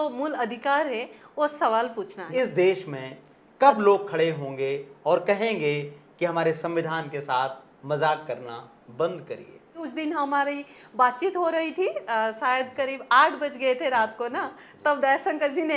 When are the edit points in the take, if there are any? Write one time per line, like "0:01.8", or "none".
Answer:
0:02.2
0:09.8